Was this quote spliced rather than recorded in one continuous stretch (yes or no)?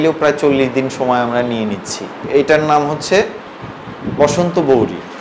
yes